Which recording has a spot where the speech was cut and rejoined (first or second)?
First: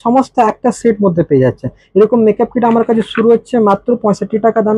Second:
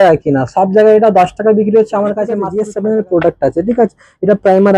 second